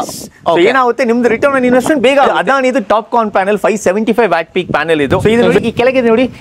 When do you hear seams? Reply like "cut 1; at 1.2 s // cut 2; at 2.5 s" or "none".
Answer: cut 1; at 2.3 s // cut 2; at 5.2 s